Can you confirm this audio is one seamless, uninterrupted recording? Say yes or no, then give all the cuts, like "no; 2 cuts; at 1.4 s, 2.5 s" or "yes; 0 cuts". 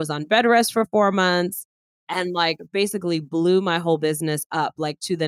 yes; 0 cuts